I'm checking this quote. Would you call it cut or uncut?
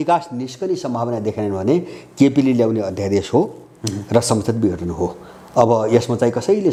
uncut